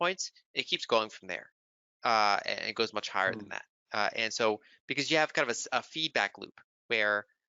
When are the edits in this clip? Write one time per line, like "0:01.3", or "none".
none